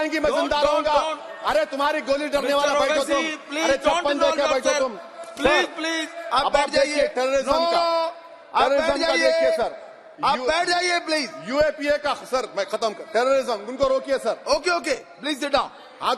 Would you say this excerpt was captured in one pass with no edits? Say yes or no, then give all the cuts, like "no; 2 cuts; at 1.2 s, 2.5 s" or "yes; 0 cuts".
yes; 0 cuts